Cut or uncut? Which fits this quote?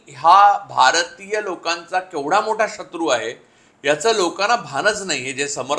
uncut